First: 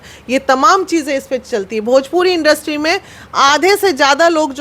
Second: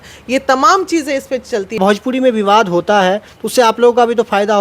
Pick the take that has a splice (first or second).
second